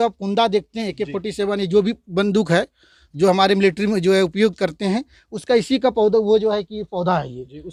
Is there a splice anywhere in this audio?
no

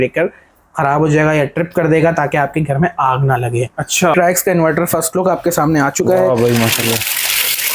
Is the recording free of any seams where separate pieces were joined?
no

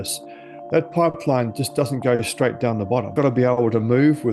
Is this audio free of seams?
yes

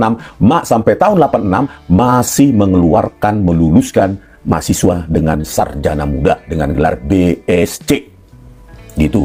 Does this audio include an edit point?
no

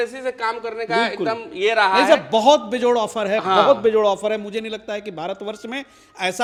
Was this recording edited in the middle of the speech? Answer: no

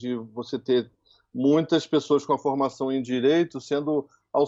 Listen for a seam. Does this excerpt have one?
no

